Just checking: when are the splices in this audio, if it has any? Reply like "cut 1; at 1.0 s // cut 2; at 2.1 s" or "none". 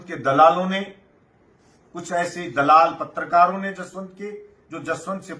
none